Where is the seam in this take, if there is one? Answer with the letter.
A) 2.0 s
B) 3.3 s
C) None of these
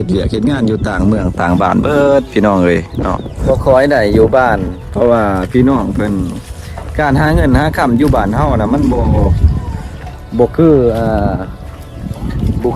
B